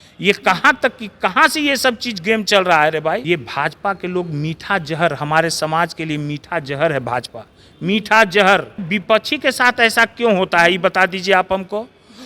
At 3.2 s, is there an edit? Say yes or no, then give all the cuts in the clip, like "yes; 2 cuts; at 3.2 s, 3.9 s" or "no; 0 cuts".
yes; 2 cuts; at 3.2 s, 8.9 s